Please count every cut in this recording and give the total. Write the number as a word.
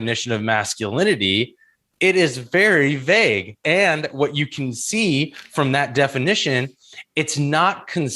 one